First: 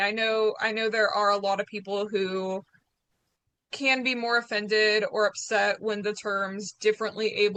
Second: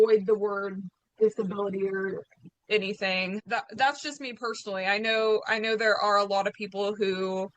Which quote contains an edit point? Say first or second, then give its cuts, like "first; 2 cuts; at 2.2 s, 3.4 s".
second; 1 cut; at 3.4 s